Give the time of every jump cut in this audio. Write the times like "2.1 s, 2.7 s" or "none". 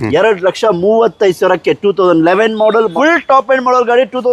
2.9 s